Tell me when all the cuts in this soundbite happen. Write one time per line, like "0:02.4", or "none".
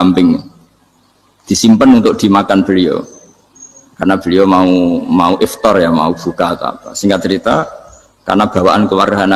none